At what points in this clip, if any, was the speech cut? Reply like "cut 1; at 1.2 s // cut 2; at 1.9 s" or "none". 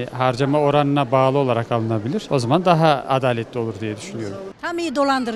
cut 1; at 4.4 s